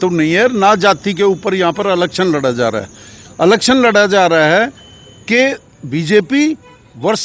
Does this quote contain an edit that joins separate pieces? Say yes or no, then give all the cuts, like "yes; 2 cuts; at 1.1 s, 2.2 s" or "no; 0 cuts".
no; 0 cuts